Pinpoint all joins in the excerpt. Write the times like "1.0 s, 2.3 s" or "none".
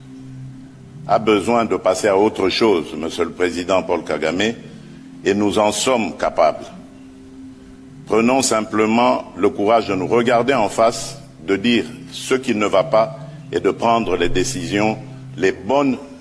none